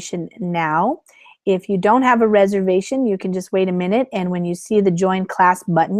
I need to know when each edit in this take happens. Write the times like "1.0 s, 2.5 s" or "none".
none